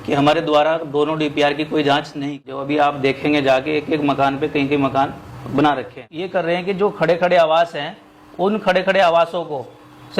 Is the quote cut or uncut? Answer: cut